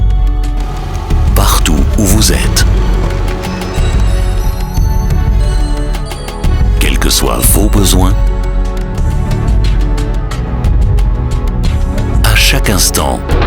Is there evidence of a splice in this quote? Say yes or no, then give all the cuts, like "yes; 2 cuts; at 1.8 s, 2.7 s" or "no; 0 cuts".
no; 0 cuts